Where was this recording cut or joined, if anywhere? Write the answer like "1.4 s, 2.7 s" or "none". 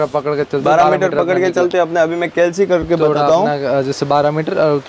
none